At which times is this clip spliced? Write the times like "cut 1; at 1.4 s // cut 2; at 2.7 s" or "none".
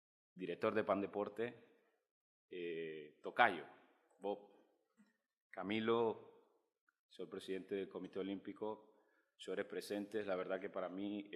cut 1; at 4.5 s